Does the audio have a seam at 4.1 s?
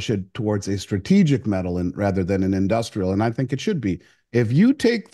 yes; 1 cut; at 4.1 s

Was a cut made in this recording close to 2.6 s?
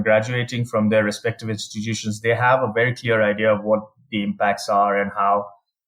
no; 0 cuts

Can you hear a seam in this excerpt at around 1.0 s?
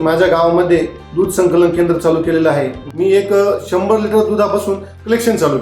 no; 1 cut; at 2.8 s

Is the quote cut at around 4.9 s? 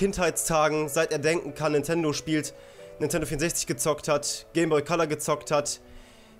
yes; 1 cut; at 4.9 s

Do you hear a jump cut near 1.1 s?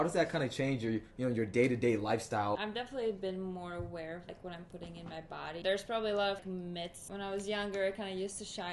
no; 4 cuts; at 2.6 s, 4.3 s, 5.6 s, 6.6 s

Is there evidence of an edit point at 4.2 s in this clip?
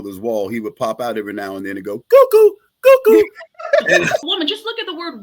yes; 1 cut; at 4.2 s

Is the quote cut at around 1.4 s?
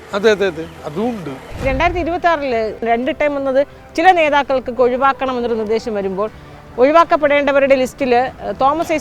yes; 1 cut; at 1.4 s

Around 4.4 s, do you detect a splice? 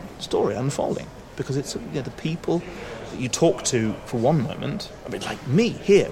no; 1 cut; at 3.1 s

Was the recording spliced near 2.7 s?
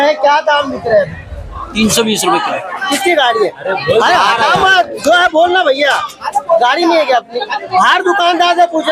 yes; 1 cut; at 2.7 s

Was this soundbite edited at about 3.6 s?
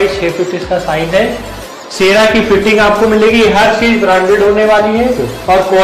no; 0 cuts

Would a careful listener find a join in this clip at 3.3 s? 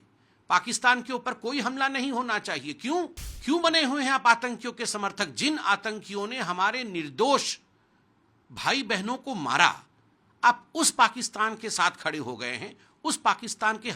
yes; 1 cut; at 3.3 s

